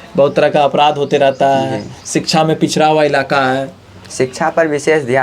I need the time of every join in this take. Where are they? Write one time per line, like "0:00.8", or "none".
none